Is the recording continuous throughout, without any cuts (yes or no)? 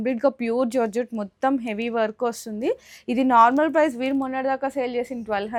yes